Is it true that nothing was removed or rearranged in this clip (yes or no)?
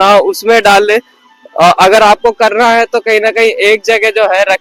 yes